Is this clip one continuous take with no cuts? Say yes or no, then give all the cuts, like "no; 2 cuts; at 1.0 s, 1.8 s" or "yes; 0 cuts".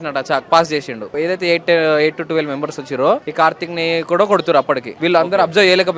no; 3 cuts; at 1.1 s, 3.3 s, 4.9 s